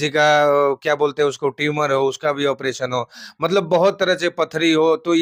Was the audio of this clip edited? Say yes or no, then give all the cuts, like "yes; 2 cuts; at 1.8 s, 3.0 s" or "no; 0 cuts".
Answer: no; 0 cuts